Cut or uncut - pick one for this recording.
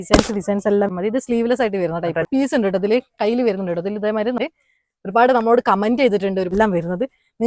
cut